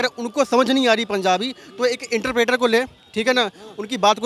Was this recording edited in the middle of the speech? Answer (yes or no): no